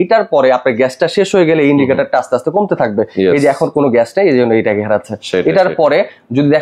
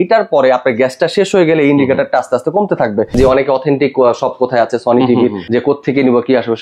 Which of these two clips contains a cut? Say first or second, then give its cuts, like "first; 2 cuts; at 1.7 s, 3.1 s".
second; 2 cuts; at 3.1 s, 5.4 s